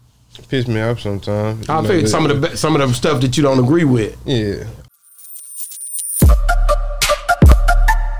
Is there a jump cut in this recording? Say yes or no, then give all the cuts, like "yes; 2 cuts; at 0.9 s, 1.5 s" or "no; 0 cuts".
yes; 1 cut; at 4.8 s